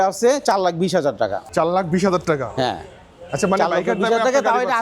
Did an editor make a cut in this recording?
yes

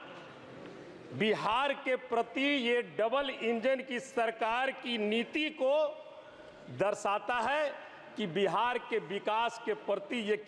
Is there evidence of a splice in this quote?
no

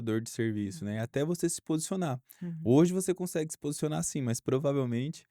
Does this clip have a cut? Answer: no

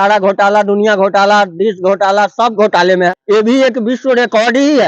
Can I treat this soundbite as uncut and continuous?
no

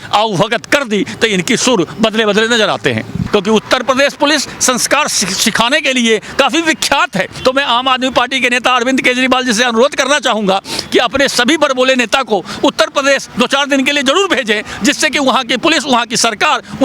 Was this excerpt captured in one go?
no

